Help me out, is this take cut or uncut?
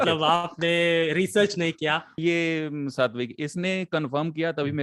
cut